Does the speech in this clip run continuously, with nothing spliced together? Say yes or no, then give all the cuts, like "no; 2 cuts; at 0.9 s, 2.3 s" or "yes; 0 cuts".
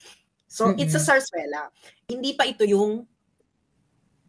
no; 1 cut; at 2.0 s